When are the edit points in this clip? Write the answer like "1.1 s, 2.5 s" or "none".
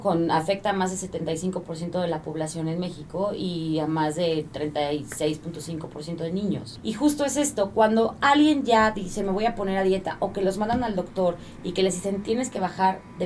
6.7 s